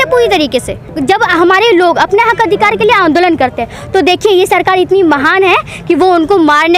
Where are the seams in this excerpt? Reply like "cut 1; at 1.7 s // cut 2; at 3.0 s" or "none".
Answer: cut 1; at 0.9 s